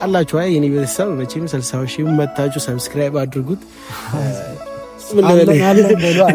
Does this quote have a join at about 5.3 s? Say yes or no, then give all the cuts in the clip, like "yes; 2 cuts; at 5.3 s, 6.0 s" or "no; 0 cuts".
no; 0 cuts